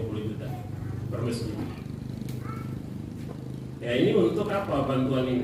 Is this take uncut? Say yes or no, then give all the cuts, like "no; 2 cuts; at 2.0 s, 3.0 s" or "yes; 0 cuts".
yes; 0 cuts